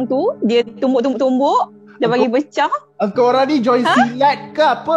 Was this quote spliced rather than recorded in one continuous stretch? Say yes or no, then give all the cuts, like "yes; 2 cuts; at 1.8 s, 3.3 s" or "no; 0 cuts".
no; 0 cuts